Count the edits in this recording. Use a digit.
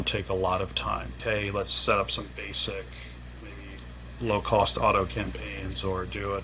0